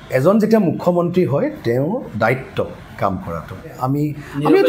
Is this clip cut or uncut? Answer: cut